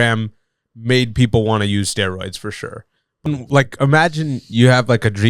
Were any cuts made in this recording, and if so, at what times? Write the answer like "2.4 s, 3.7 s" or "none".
3.3 s